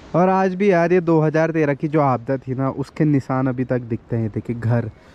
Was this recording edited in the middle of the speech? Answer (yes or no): no